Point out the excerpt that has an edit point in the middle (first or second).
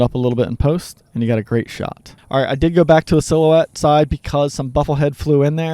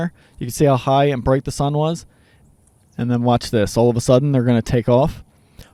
first